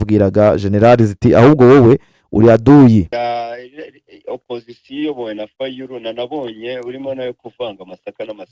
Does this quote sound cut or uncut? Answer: cut